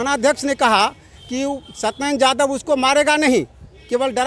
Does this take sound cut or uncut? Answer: uncut